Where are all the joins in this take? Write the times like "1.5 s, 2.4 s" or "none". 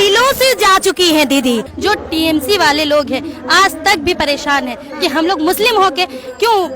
1.7 s

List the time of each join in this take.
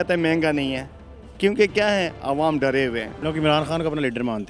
3.1 s

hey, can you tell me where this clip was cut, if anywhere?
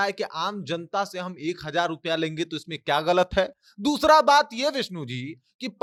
none

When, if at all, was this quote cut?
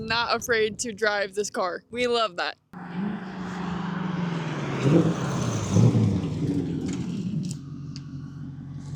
none

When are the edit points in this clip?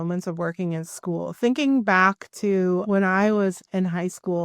2.8 s

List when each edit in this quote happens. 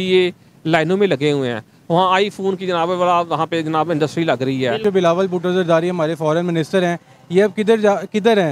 4.8 s

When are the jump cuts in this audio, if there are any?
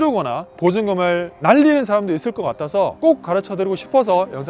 2.9 s

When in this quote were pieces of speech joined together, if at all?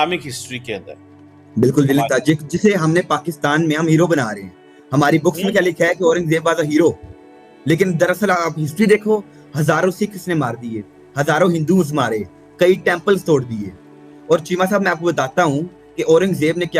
none

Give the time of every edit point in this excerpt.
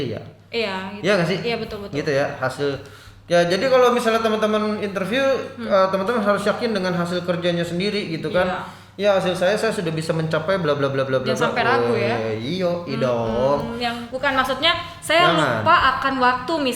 14.1 s

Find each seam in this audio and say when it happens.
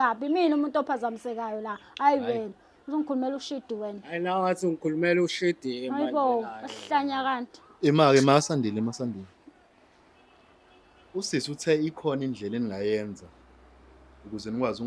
none

